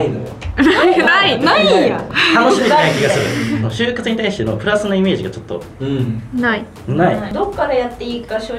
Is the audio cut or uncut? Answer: cut